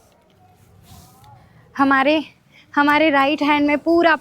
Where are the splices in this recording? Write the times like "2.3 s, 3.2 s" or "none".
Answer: none